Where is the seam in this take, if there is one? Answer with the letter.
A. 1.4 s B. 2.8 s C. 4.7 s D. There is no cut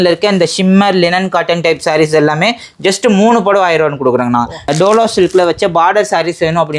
C